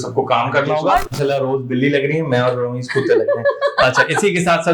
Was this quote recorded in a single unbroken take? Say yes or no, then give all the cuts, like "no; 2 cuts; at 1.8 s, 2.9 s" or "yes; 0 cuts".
no; 1 cut; at 1.1 s